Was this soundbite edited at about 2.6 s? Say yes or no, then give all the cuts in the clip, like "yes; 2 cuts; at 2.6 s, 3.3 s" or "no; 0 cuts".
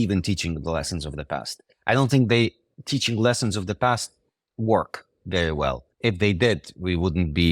no; 1 cut; at 5.9 s